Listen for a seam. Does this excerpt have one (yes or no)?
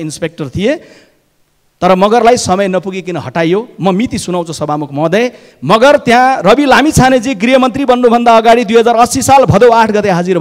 no